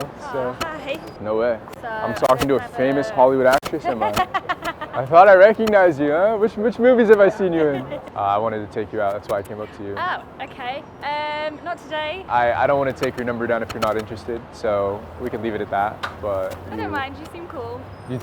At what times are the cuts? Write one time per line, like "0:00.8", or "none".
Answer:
0:01.1
0:08.0
0:12.2